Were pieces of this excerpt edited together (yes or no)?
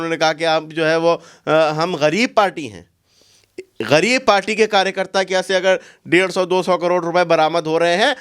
no